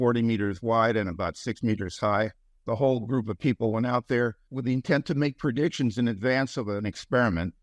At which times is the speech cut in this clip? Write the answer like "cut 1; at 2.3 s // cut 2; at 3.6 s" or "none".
cut 1; at 2.5 s // cut 2; at 4.5 s // cut 3; at 6.8 s